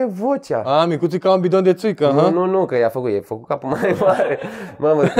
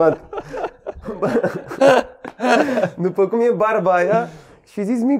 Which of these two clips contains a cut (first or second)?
second